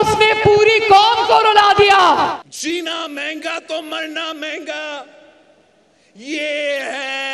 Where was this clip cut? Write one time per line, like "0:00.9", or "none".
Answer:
0:02.4